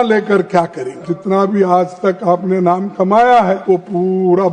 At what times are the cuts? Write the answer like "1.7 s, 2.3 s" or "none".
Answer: 1.1 s, 3.6 s

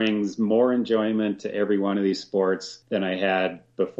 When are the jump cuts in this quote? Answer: 2.7 s

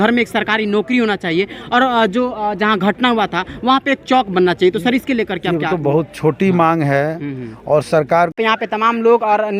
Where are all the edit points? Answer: 8.4 s

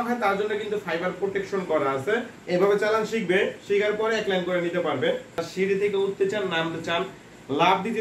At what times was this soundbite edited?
2.3 s, 5.4 s

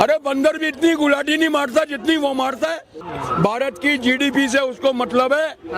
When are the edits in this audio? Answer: 2.9 s

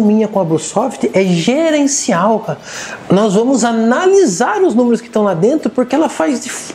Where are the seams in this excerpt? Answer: none

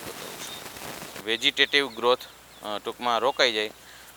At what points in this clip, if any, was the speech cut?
1.2 s

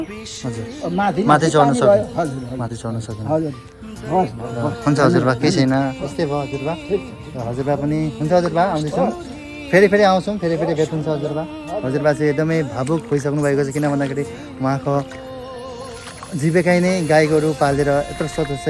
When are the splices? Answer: none

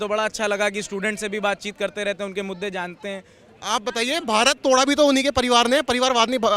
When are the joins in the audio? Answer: 3.5 s

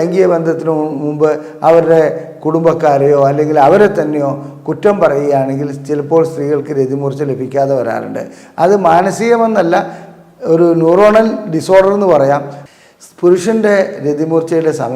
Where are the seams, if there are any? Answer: 12.6 s

